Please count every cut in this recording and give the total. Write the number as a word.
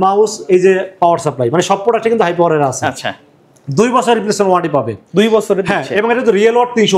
zero